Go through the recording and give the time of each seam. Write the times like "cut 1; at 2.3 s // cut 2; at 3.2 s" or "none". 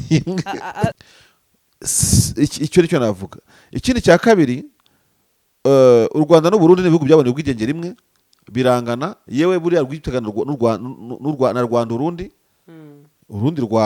cut 1; at 1.0 s